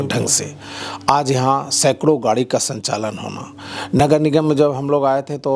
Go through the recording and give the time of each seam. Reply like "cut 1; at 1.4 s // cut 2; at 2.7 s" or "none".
none